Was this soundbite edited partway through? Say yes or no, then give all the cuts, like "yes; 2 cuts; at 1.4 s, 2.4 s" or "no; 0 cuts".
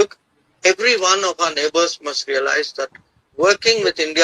no; 0 cuts